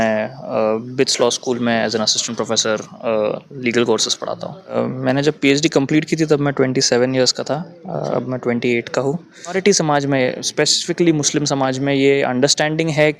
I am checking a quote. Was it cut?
yes; 2 cuts; at 4.8 s, 9.6 s

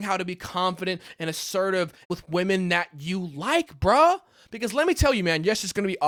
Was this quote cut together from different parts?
no; 0 cuts

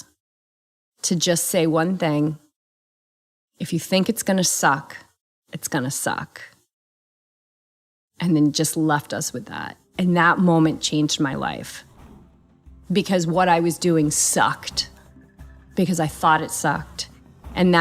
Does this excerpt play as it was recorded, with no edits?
yes; 0 cuts

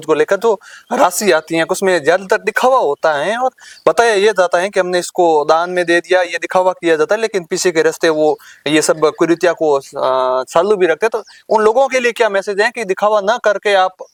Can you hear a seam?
no; 0 cuts

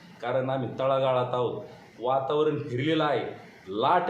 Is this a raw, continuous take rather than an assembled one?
no; 1 cut; at 1.8 s

